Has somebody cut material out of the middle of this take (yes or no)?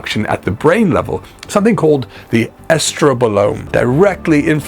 yes